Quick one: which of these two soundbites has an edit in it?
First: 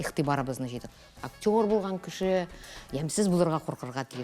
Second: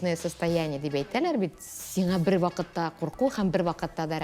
first; 1 cut; at 1.0 s

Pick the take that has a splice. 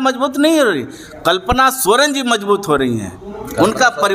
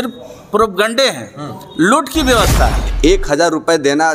second; 1 cut; at 2.8 s

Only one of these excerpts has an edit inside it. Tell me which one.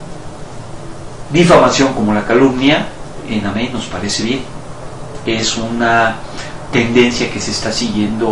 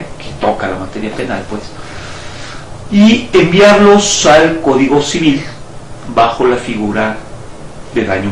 first; 1 cut; at 1.9 s

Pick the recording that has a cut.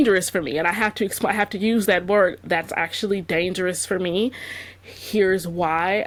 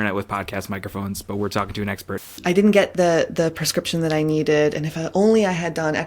second; 1 cut; at 2.3 s

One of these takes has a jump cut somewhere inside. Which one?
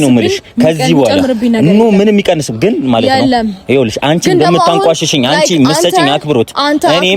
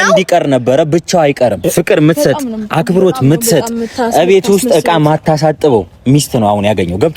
second; 1 cut; at 1.6 s

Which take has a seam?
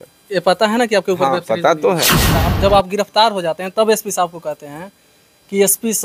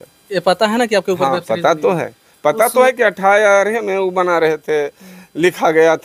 first; 1 cut; at 2.2 s

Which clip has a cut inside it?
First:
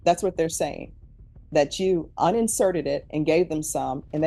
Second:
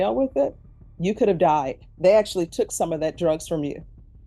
second; 1 cut; at 1.8 s

